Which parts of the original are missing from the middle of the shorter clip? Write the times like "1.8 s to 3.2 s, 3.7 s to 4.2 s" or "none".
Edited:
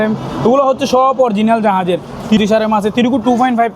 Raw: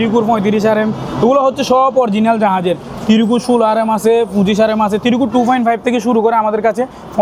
3.2 s to 4.5 s